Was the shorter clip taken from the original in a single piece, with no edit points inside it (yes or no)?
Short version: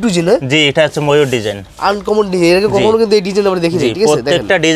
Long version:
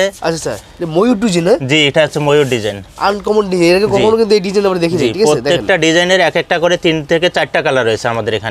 yes